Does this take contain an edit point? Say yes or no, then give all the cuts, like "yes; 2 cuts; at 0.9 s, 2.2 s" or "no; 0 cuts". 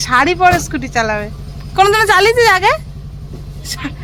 no; 0 cuts